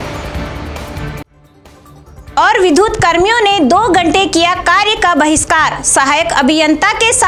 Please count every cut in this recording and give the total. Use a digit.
0